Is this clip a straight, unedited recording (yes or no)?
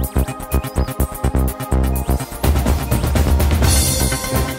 yes